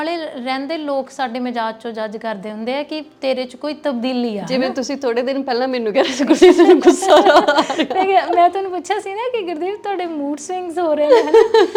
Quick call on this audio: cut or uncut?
uncut